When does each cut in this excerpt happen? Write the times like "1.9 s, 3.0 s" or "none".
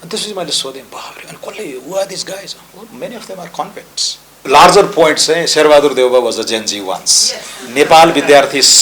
4.3 s